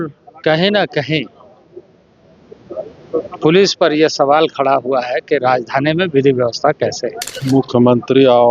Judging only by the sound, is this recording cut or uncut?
cut